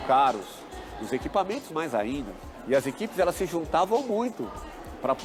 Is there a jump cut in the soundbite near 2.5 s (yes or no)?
no